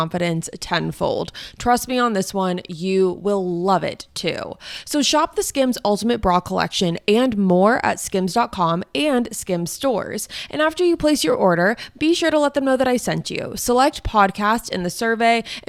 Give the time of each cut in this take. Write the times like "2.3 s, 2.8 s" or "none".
none

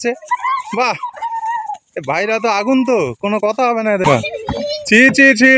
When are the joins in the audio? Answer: 4.0 s

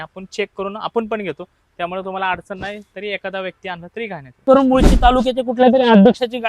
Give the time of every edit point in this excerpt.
4.4 s

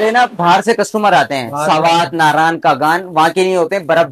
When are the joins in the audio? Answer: none

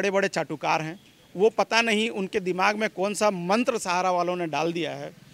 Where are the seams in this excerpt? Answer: none

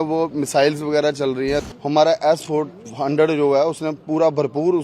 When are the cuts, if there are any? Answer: 1.6 s

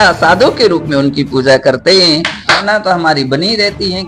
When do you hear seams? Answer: 2.6 s

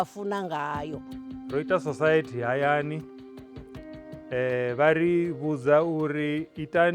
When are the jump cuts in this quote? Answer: 1.1 s

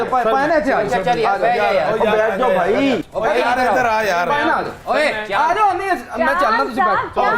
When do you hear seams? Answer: 3.1 s

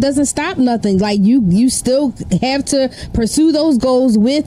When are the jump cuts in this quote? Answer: none

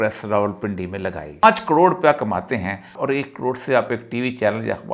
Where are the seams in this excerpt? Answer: 1.4 s, 3.0 s

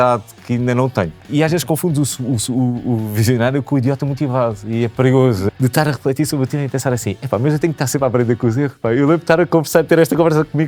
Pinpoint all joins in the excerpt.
1.3 s, 5.4 s

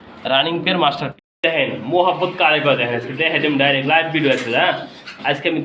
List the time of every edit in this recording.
1.1 s

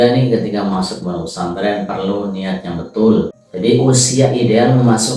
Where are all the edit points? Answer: 3.4 s

